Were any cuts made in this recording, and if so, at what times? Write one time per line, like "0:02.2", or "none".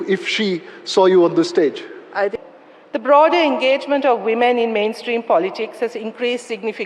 0:02.3

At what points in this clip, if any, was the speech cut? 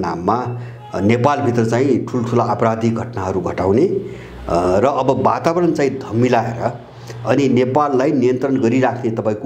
none

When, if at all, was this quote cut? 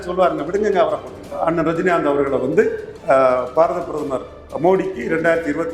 0:01.3

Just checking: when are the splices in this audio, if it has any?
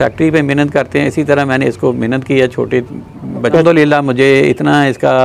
0:03.6

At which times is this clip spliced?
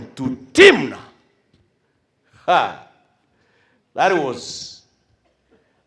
none

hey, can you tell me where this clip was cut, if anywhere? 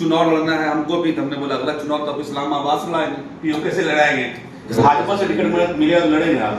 0:04.7

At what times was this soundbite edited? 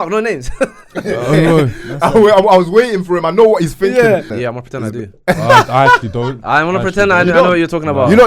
0:04.3

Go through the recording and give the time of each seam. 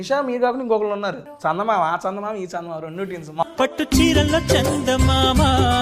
0:01.3
0:03.4

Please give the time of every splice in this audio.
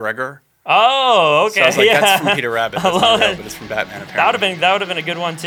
none

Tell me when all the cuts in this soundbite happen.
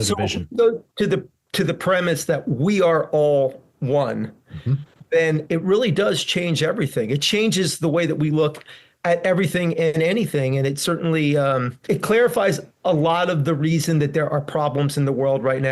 0:11.8

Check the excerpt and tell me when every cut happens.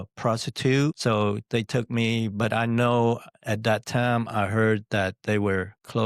0:01.0

